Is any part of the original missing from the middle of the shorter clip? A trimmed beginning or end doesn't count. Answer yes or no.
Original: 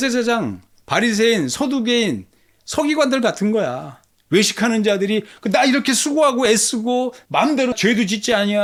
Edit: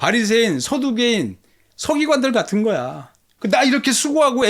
yes